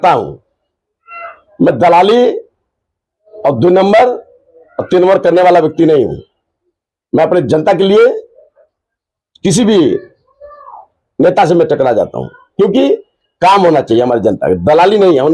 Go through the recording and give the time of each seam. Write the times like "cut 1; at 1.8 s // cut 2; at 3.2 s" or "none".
none